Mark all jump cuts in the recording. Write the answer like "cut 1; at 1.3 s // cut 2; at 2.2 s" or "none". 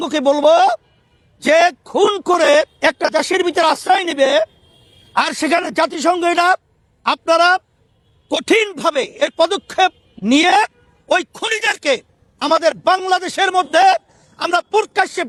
none